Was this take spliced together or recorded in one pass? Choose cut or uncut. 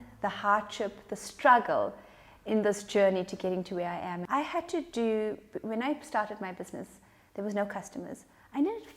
cut